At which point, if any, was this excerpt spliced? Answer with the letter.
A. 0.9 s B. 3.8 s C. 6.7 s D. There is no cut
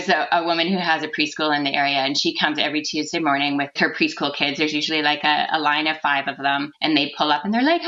B